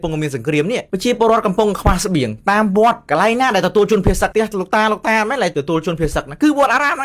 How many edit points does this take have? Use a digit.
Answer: 1